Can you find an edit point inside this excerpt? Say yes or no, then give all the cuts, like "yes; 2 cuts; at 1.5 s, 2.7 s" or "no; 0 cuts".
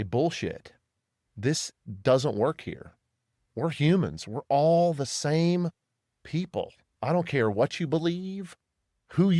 no; 0 cuts